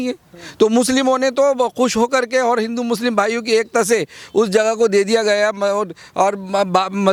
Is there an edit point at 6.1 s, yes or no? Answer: no